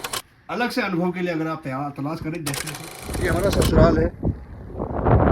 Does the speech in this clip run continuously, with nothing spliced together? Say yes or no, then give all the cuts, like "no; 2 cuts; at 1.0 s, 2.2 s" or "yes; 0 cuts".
no; 1 cut; at 3.1 s